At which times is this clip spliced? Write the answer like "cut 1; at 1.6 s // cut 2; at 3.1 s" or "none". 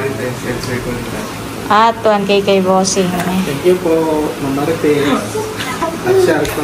none